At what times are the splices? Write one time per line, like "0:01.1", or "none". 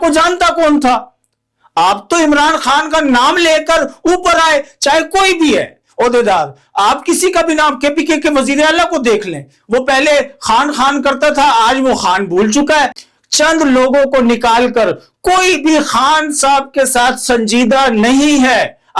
0:13.0